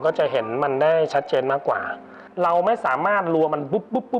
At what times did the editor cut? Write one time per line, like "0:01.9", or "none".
0:02.2